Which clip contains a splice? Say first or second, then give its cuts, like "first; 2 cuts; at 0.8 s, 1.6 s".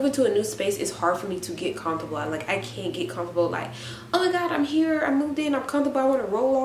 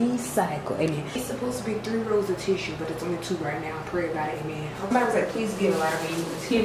second; 2 cuts; at 1.2 s, 4.9 s